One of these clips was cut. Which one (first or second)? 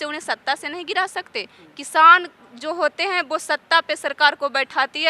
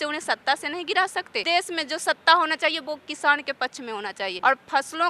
second